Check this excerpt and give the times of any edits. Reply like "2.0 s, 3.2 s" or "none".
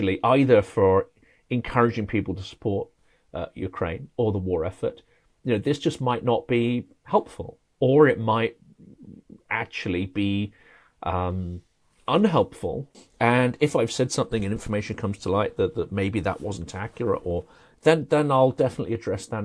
12.9 s